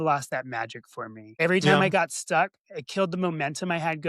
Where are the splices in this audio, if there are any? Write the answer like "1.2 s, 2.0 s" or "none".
1.3 s